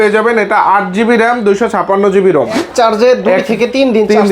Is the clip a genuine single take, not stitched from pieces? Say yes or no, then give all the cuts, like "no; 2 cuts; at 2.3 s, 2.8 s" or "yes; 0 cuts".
no; 1 cut; at 2.6 s